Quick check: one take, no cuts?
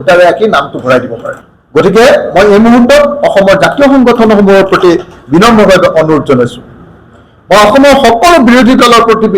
yes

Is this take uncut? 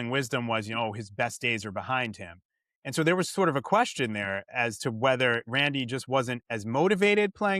yes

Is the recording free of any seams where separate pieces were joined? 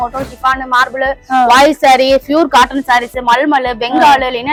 yes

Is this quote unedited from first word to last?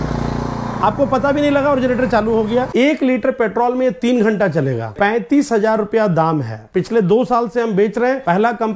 no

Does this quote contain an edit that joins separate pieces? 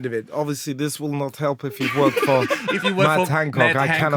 no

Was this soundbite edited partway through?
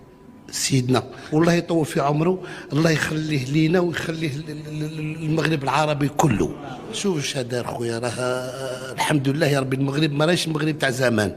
yes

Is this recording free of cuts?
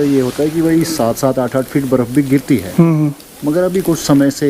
yes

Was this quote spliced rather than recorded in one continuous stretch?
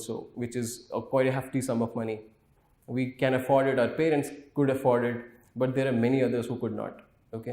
no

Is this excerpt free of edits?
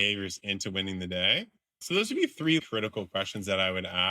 no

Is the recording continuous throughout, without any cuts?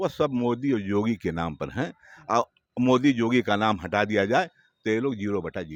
yes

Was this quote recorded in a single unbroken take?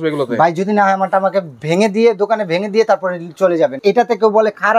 no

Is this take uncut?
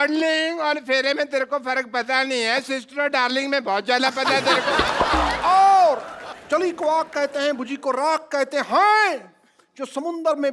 no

